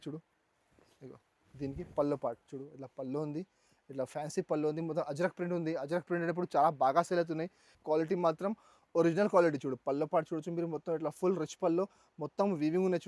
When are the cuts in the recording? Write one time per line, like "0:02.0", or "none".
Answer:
0:07.7